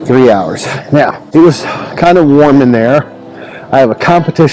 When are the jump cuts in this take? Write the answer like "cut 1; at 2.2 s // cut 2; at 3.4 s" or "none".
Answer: cut 1; at 1.2 s